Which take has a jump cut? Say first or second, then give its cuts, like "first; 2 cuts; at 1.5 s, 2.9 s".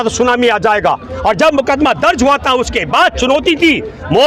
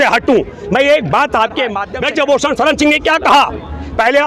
second; 1 cut; at 1.9 s